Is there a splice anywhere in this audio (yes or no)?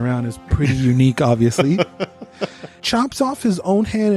yes